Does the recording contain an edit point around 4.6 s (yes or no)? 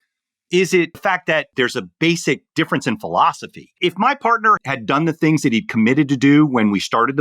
yes